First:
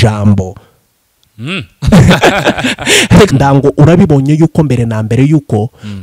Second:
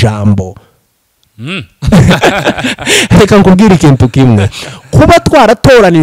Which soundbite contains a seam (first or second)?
first